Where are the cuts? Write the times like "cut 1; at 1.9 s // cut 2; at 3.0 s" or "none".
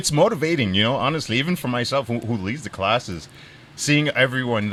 none